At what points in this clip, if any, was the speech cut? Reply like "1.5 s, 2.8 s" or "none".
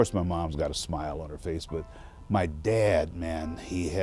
none